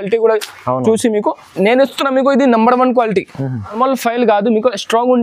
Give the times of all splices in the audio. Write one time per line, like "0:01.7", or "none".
0:03.8